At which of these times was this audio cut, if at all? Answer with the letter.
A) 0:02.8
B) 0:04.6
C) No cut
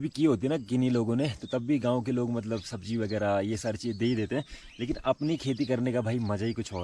C